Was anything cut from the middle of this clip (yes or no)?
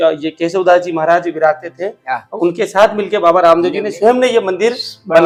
no